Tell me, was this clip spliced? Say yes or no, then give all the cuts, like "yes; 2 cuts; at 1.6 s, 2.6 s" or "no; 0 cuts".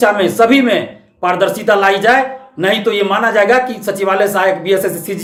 no; 0 cuts